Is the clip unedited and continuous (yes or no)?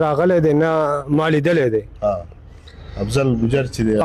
yes